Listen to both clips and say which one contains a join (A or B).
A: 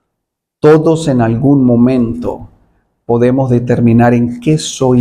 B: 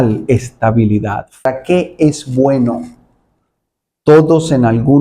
B